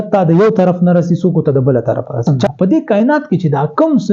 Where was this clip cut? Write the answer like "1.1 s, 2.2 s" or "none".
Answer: 2.3 s